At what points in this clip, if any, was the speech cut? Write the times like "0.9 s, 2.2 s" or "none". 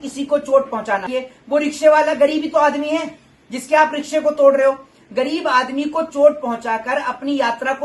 1.2 s